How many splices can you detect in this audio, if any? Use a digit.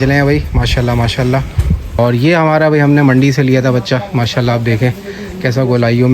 1